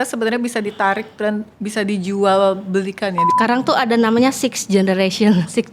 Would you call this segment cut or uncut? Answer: cut